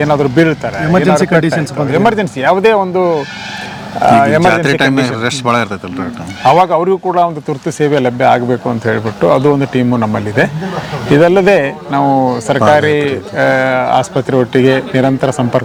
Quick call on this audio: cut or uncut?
uncut